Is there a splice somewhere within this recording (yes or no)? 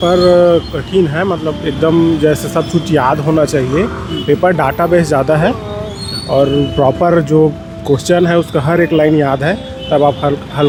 no